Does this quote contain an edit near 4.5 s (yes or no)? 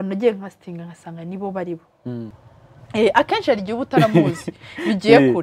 no